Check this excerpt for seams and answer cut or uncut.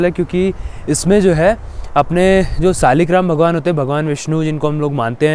uncut